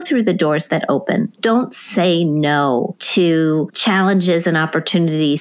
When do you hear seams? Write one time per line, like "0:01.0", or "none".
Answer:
0:01.3
0:03.0
0:03.7